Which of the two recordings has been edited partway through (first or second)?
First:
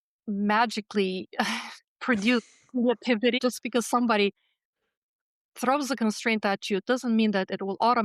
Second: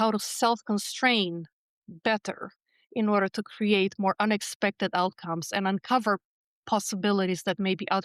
first